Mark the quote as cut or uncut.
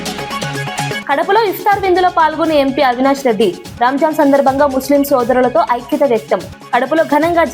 uncut